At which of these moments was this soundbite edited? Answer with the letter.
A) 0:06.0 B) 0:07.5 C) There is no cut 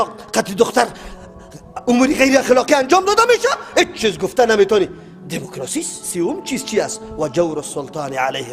A